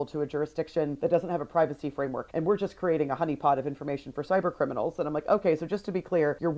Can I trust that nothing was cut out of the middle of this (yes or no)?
yes